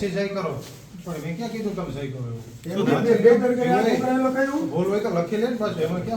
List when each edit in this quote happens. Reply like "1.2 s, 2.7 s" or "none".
none